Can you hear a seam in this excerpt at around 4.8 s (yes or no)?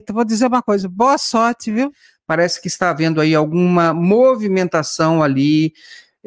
no